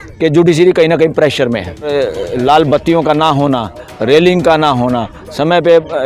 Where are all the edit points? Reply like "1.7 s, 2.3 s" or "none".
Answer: 1.9 s